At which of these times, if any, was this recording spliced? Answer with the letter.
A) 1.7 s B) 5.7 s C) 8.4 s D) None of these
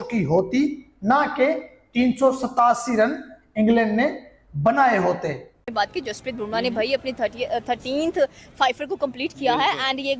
B